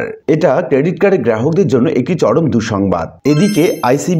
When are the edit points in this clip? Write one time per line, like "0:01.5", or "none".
0:03.1

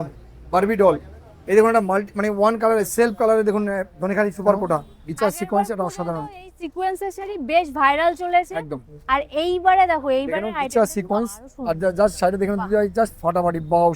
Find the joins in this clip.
0:04.8

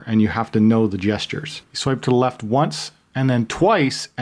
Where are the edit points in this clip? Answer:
0:01.6

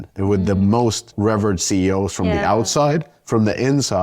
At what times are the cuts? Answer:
0:01.1

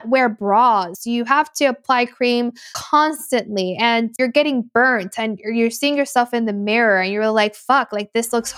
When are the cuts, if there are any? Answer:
0:00.9
0:02.7
0:04.1

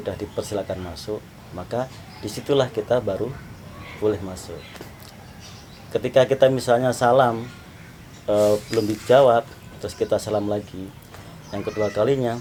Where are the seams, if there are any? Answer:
none

